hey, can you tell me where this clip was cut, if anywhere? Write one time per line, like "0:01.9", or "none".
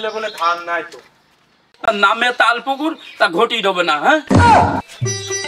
0:01.6

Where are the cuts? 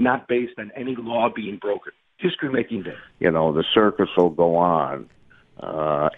0:03.0

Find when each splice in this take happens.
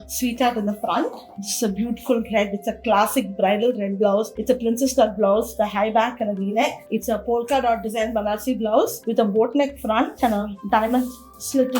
none

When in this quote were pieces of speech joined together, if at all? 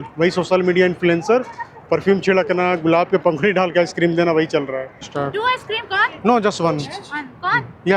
none

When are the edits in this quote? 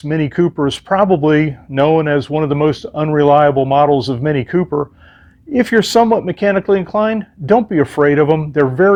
none

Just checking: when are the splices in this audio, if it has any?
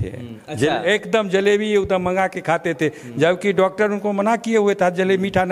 none

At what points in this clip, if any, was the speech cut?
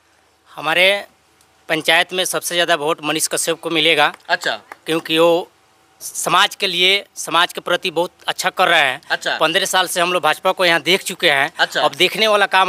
none

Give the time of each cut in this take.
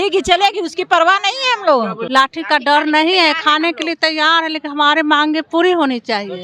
0:02.0

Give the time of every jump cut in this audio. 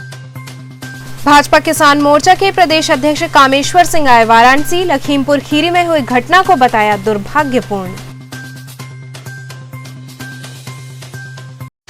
0:00.9

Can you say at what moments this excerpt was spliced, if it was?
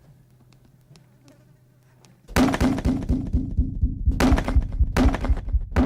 none

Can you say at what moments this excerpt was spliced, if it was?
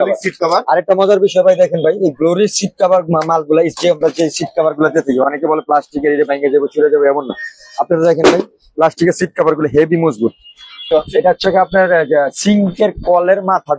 0:10.8

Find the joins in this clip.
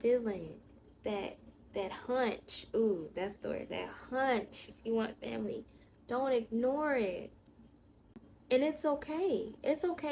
none

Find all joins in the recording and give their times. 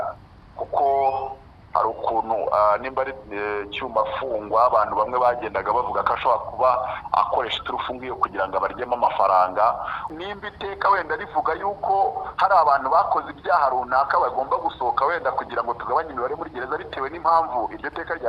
0:10.1

